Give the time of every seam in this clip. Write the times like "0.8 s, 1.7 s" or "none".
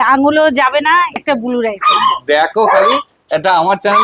1.2 s